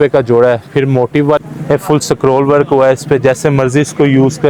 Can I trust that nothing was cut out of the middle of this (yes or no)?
no